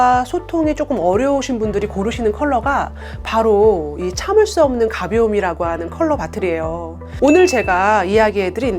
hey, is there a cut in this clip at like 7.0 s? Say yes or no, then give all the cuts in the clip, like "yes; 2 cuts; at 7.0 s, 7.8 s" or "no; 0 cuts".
yes; 1 cut; at 7.0 s